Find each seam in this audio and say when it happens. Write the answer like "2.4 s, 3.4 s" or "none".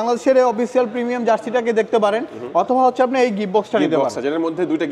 none